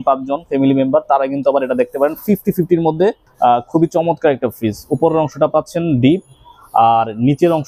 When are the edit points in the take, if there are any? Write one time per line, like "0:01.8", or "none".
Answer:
0:03.3